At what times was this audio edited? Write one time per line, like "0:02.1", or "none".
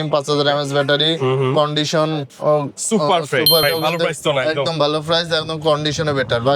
0:03.6